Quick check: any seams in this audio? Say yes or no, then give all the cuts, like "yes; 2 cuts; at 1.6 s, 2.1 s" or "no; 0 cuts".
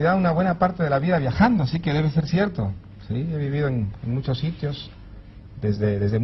no; 0 cuts